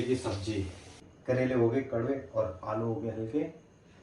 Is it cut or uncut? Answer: cut